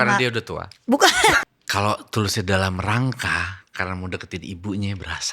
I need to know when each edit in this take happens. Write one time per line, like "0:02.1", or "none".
0:01.4